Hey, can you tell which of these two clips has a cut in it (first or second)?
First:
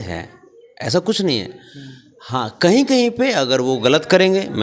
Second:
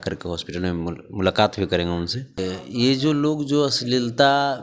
second